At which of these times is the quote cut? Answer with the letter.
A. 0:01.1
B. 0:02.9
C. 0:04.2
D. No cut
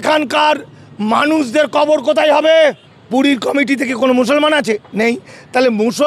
B